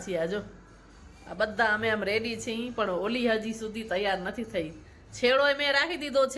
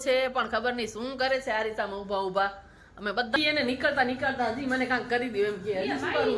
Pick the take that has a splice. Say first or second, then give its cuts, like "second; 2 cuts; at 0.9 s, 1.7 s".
second; 1 cut; at 3.4 s